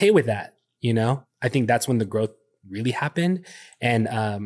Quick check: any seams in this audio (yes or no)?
yes